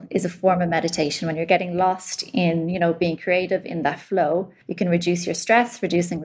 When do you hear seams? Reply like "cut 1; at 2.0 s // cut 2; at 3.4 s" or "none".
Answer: none